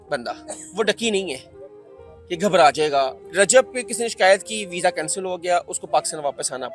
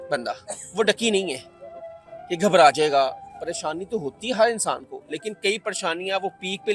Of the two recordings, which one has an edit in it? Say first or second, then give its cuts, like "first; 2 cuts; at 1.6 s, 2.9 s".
first; 1 cut; at 3.2 s